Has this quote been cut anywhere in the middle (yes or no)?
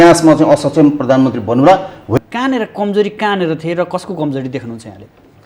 yes